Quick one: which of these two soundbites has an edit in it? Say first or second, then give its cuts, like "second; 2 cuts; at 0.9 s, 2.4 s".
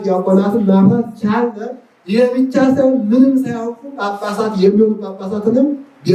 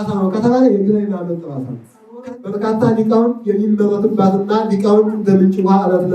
second; 1 cut; at 2.2 s